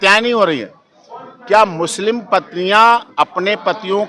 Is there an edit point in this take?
no; 0 cuts

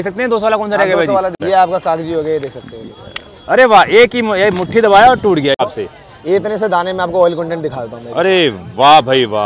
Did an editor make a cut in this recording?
yes; 2 cuts; at 1.4 s, 5.6 s

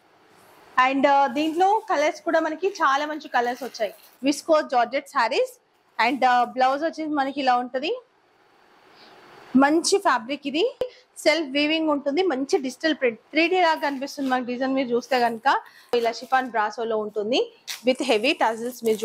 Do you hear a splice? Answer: yes; 3 cuts; at 4.1 s, 11.0 s, 15.9 s

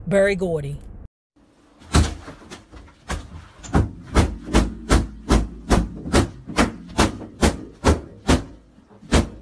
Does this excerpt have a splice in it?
no; 0 cuts

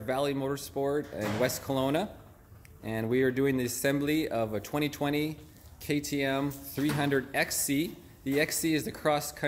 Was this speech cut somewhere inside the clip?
no; 0 cuts

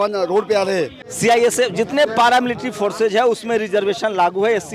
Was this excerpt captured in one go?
no; 1 cut; at 1.0 s

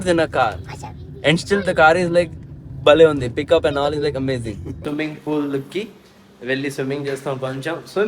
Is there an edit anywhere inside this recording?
yes; 1 cut; at 4.7 s

